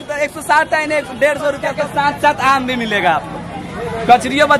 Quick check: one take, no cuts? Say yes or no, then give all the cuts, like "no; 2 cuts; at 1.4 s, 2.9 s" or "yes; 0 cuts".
no; 1 cut; at 1.8 s